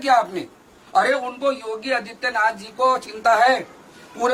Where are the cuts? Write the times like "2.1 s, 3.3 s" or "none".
none